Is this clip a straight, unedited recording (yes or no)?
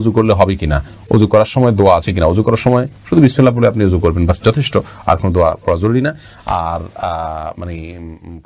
yes